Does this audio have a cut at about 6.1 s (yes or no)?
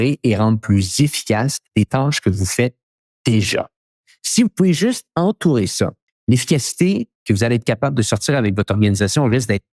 yes